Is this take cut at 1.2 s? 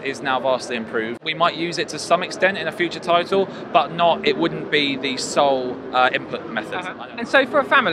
yes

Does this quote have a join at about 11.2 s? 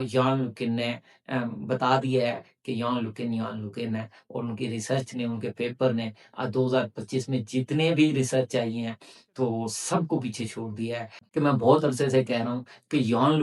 yes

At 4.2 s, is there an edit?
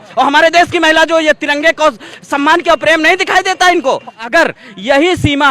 yes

